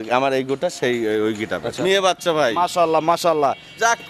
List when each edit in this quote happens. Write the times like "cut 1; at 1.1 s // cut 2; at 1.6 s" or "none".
cut 1; at 1.8 s